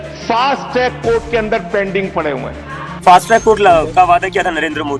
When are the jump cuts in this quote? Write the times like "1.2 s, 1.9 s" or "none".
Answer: 2.9 s